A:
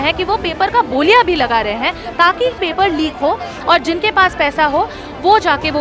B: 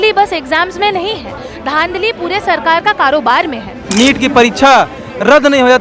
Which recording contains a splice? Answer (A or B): B